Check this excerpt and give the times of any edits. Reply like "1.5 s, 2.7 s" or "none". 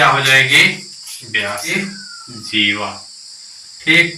1.7 s